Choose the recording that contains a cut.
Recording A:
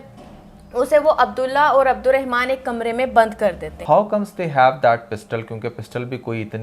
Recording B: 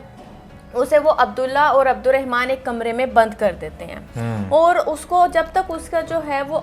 A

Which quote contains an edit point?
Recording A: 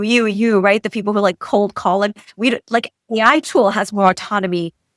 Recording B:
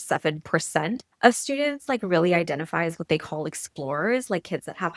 B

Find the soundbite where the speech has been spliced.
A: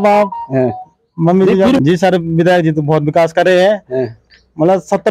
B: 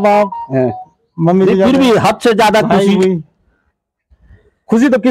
A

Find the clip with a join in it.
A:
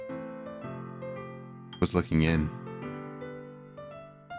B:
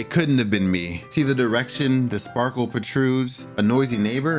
B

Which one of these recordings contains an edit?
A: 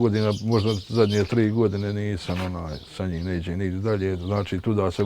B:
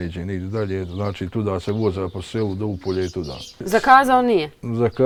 A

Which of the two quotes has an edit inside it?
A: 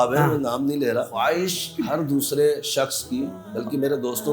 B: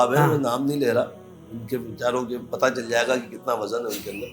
A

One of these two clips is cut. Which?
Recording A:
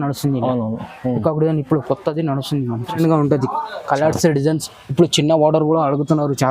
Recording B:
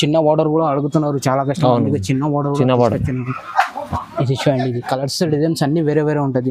A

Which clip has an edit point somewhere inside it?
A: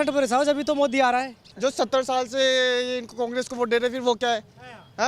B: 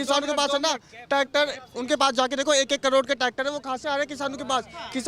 A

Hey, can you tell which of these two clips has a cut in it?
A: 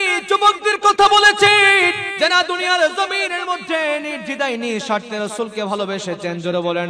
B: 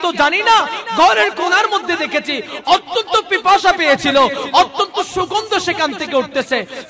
A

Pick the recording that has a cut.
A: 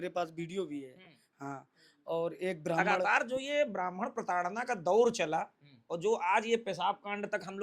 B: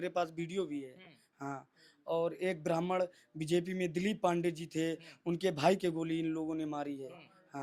A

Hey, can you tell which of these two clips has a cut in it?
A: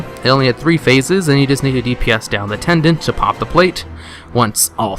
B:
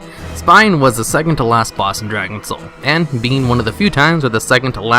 B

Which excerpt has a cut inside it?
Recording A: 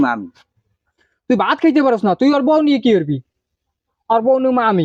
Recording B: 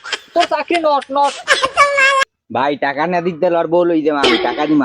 B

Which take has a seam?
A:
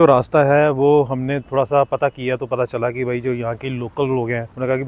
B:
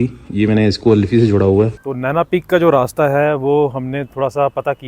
B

